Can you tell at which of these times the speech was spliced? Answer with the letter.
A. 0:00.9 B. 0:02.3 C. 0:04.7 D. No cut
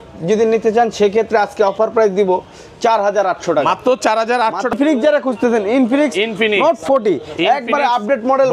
C